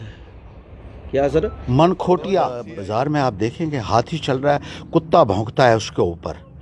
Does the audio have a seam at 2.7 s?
yes; 1 cut; at 2.7 s

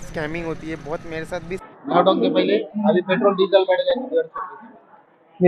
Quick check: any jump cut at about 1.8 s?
yes; 1 cut; at 1.8 s

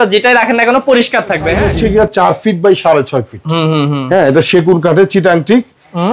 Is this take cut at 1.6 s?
yes; 1 cut; at 1.6 s

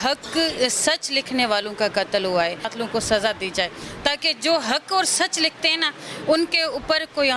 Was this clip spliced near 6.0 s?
no; 1 cut; at 2.7 s

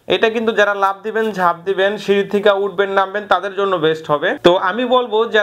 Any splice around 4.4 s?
yes; 1 cut; at 4.4 s

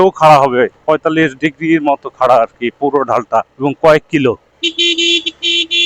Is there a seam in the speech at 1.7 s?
no; 2 cuts; at 3.5 s, 4.5 s

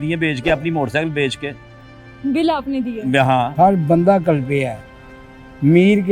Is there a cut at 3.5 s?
yes; 1 cut; at 3.5 s

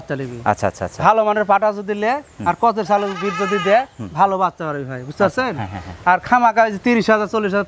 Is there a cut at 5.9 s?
no; 0 cuts

